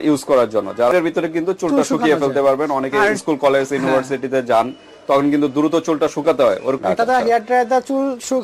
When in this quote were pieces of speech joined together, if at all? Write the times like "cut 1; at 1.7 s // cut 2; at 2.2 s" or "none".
cut 1; at 1.0 s // cut 2; at 6.8 s